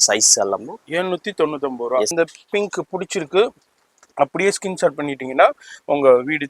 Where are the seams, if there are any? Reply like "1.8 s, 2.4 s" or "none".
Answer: 2.1 s